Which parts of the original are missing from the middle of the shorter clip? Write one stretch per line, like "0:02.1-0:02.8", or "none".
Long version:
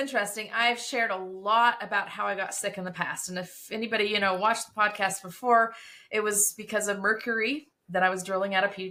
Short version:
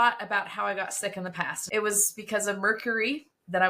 0:03.1-0:05.9